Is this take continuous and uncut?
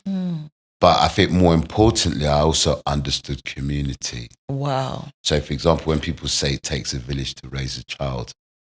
yes; 0 cuts

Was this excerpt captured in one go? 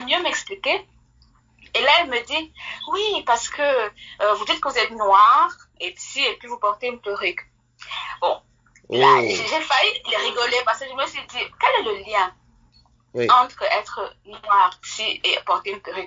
yes; 0 cuts

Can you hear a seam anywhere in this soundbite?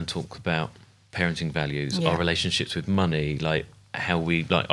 no; 0 cuts

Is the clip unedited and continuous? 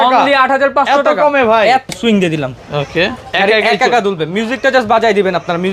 no; 1 cut; at 1.9 s

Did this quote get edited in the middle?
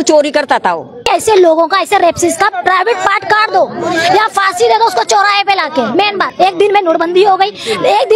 yes; 2 cuts; at 1.0 s, 6.2 s

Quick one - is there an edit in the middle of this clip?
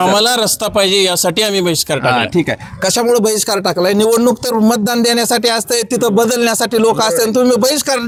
no; 0 cuts

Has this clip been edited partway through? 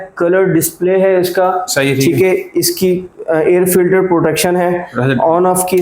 no; 0 cuts

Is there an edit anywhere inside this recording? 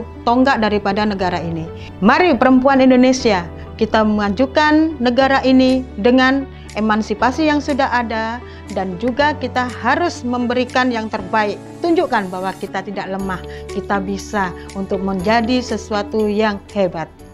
no; 0 cuts

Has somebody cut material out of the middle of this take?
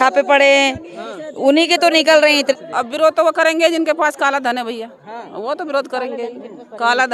yes; 1 cut; at 2.5 s

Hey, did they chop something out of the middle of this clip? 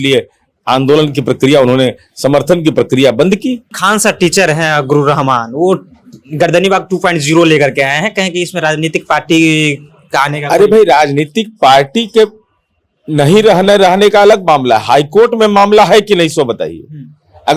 yes; 1 cut; at 3.7 s

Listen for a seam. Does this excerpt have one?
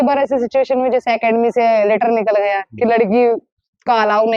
no; 0 cuts

